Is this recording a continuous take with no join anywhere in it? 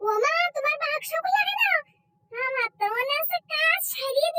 yes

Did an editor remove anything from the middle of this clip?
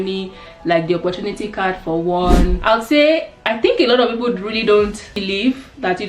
yes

